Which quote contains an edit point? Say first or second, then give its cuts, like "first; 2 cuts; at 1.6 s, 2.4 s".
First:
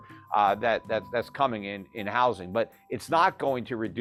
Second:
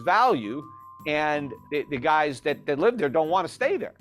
second; 1 cut; at 1.5 s